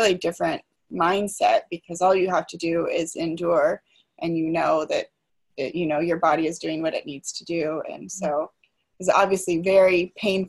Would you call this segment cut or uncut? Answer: uncut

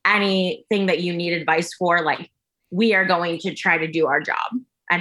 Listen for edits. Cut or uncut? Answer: uncut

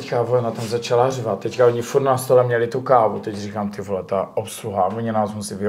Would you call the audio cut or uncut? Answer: uncut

